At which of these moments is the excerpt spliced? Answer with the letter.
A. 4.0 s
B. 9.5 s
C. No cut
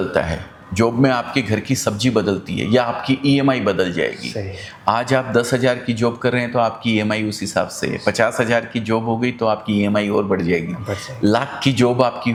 C